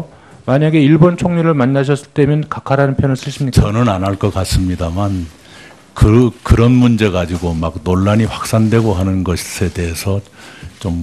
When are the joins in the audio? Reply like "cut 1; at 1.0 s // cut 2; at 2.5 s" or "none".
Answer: none